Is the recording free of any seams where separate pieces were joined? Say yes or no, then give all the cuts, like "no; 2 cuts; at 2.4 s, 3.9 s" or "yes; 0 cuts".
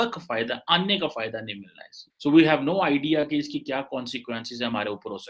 yes; 0 cuts